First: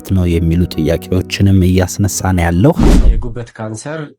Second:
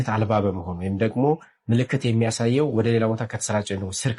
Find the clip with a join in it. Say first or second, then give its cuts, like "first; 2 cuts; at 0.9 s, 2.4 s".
first; 1 cut; at 2.9 s